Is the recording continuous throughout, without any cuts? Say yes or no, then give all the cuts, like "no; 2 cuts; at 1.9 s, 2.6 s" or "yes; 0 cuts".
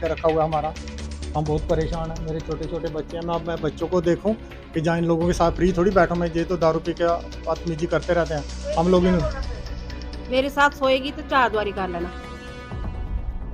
yes; 0 cuts